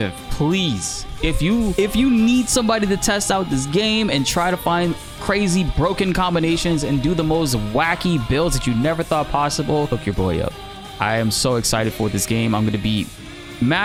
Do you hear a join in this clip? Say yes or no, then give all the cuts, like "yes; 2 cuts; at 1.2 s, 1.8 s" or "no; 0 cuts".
no; 0 cuts